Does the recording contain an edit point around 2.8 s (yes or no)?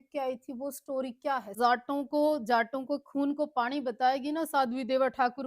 no